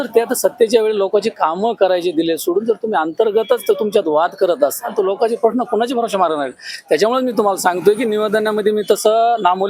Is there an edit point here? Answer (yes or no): no